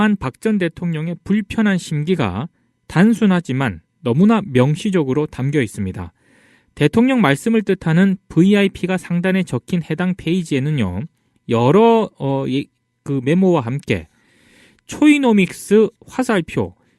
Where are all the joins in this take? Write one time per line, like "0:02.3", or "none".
0:01.2